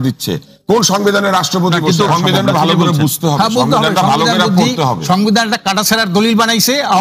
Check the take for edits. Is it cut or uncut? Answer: cut